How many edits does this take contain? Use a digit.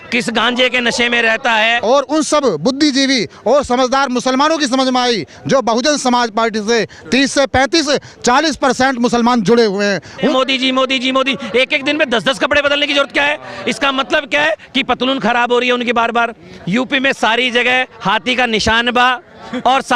3